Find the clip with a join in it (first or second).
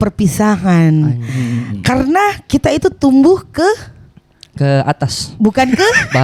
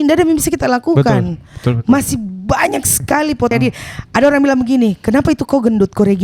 second